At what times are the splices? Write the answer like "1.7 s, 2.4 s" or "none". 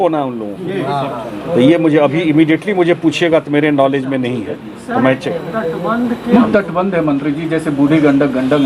6.3 s